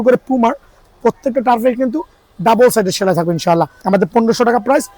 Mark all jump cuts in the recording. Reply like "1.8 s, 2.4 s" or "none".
3.8 s